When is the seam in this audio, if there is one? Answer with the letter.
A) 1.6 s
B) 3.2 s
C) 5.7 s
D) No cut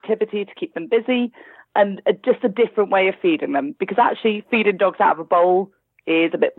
A